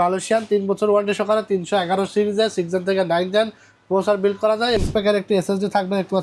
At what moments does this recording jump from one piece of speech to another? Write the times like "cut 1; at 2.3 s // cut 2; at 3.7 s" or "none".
cut 1; at 4.8 s